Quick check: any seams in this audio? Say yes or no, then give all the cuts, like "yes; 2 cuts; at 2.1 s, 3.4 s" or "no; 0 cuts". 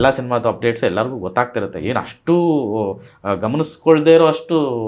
no; 0 cuts